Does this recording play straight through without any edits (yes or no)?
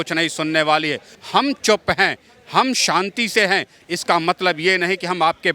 no